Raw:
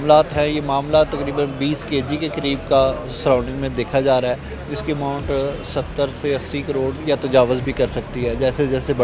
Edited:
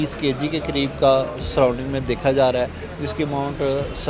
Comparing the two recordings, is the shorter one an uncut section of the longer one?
yes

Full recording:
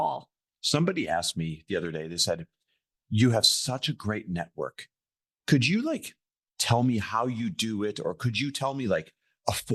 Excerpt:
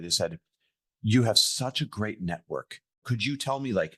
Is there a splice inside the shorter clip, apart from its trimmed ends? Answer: yes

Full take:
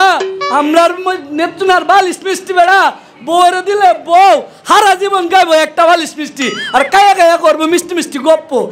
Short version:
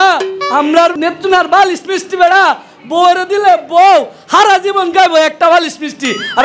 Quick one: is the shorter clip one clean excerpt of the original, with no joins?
no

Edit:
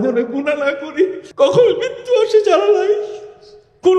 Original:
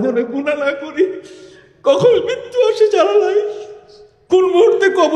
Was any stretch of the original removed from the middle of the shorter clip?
yes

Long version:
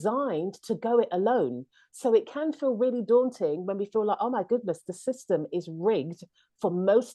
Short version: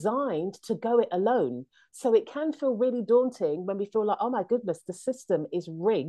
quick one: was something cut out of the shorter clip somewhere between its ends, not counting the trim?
no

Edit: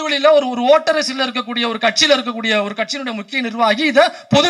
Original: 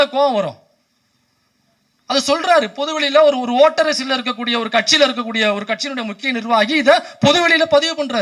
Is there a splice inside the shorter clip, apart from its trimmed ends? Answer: no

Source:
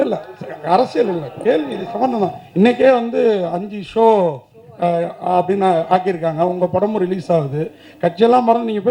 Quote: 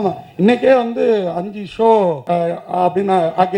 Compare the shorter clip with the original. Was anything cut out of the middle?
yes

